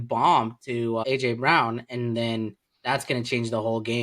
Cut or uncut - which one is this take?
cut